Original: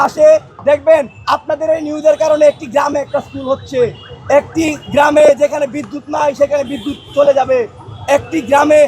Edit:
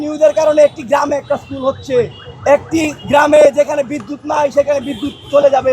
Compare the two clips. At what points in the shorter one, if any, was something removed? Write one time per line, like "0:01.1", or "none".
none